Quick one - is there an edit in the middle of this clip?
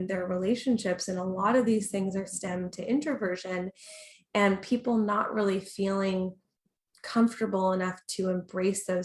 no; 0 cuts

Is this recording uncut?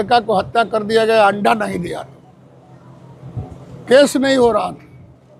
yes; 0 cuts

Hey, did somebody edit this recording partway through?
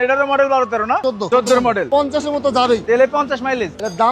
yes; 2 cuts; at 1.1 s, 1.9 s

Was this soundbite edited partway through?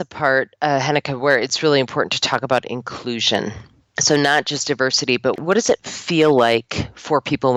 no; 0 cuts

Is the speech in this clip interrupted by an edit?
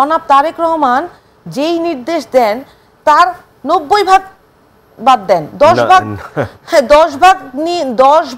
no; 0 cuts

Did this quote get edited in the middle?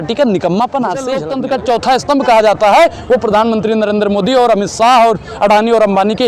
yes; 1 cut; at 1.2 s

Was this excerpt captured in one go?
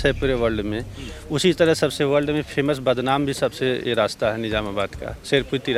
yes; 0 cuts

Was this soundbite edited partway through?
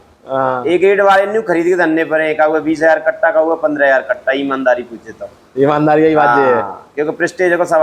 no; 0 cuts

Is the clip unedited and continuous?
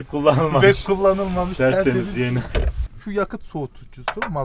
no; 1 cut; at 2.9 s

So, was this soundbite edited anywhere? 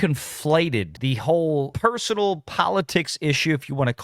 yes; 1 cut; at 1.0 s

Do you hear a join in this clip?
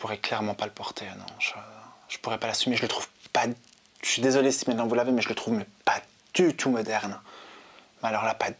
no; 0 cuts

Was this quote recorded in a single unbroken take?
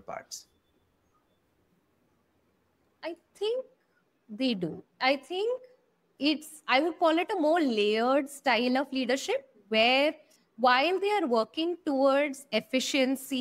yes; 0 cuts

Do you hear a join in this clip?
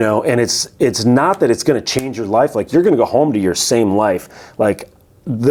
no; 0 cuts

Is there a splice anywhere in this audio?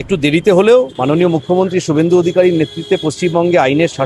yes; 1 cut; at 0.9 s

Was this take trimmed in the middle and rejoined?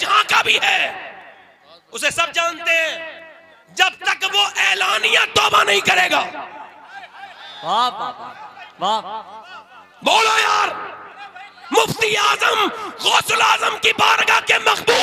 no; 0 cuts

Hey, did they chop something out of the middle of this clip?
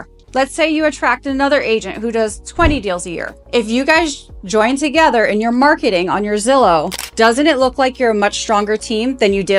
no; 0 cuts

